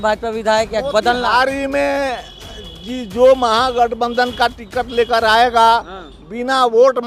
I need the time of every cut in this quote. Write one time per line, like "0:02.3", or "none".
none

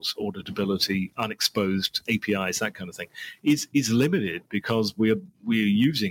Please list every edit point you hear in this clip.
0:01.1
0:02.0

